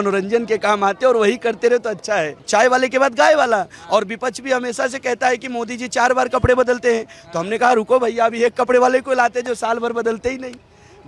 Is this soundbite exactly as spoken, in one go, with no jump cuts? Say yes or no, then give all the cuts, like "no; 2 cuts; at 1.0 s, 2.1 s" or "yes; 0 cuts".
no; 1 cut; at 2.4 s